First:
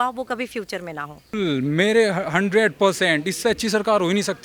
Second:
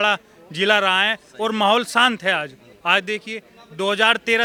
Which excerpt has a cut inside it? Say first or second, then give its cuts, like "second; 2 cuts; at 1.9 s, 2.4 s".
first; 1 cut; at 1.3 s